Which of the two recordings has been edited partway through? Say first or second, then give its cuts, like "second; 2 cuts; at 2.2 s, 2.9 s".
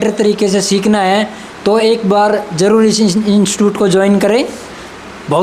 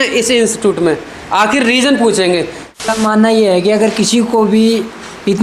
second; 1 cut; at 2.9 s